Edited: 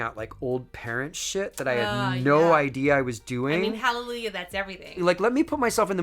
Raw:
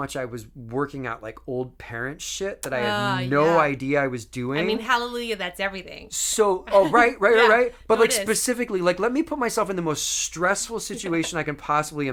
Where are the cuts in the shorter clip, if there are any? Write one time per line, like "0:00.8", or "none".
0:04.9